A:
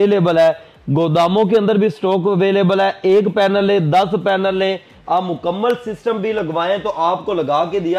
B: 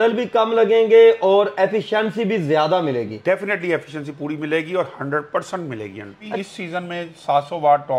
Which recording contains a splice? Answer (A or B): B